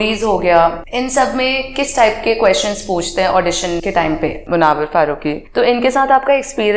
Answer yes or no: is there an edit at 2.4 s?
no